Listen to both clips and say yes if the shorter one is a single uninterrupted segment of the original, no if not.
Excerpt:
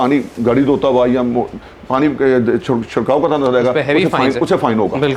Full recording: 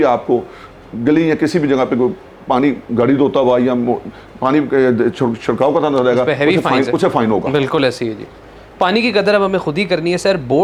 yes